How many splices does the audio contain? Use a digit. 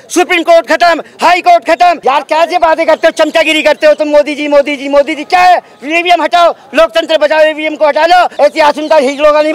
2